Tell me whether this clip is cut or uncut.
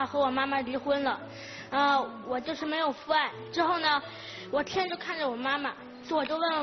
uncut